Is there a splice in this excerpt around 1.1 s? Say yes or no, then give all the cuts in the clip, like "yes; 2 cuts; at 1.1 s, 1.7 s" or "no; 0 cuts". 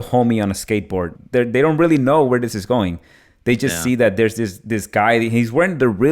yes; 1 cut; at 1.1 s